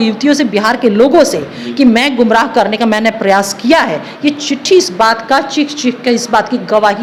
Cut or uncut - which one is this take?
uncut